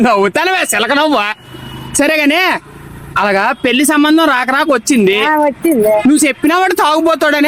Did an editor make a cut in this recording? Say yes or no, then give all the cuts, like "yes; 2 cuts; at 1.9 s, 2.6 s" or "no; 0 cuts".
no; 0 cuts